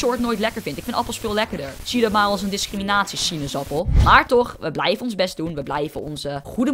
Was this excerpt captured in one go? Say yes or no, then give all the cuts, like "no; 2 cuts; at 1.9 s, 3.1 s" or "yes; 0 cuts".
no; 1 cut; at 4.0 s